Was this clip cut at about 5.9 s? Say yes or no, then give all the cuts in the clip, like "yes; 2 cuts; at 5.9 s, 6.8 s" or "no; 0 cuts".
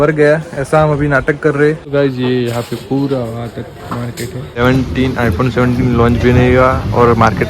no; 2 cuts; at 1.8 s, 4.6 s